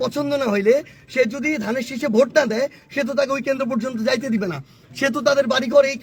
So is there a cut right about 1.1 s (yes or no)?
no